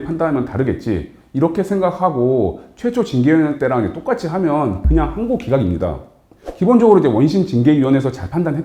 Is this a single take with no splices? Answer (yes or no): yes